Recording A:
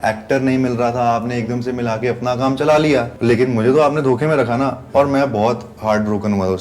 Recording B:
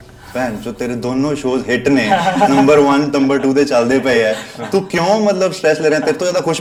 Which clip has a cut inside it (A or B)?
A